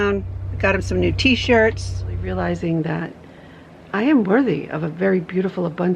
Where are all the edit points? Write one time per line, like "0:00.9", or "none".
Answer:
0:02.3